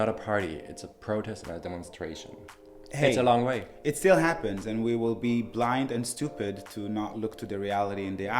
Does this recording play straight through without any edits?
no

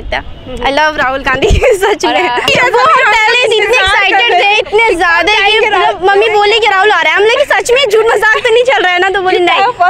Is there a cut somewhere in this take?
yes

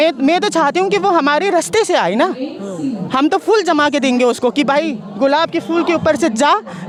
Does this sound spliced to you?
no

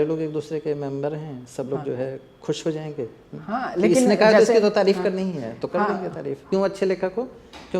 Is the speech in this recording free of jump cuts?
no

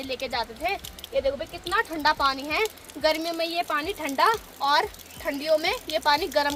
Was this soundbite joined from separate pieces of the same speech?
no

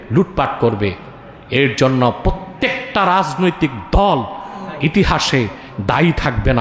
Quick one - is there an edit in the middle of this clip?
no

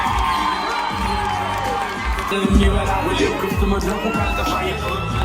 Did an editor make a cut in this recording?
yes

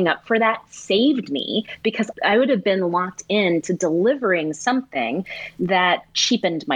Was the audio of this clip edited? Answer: no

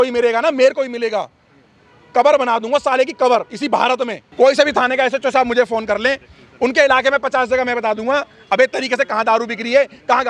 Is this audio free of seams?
no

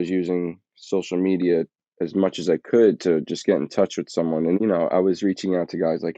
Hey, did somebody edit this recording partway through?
yes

